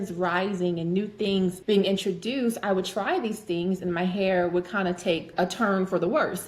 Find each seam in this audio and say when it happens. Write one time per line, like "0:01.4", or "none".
0:01.6
0:05.3